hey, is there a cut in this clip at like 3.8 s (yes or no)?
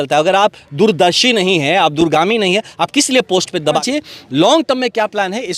yes